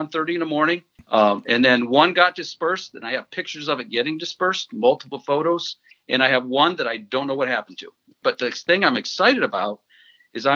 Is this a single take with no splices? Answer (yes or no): no